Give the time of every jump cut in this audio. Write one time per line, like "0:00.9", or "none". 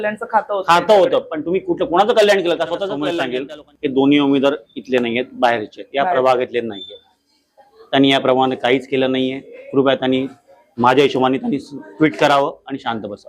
0:03.2